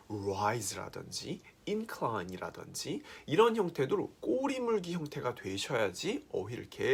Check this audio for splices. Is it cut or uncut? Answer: uncut